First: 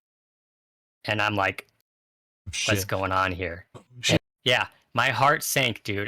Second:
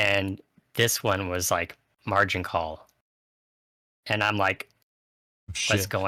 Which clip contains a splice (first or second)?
first